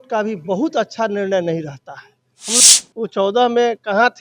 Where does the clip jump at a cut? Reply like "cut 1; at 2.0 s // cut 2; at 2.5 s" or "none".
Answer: cut 1; at 2.6 s